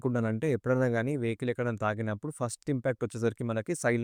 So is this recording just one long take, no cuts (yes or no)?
yes